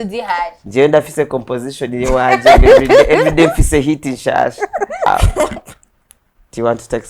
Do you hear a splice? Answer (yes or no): yes